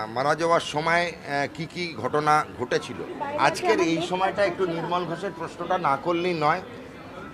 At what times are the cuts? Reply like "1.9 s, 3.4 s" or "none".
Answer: 3.1 s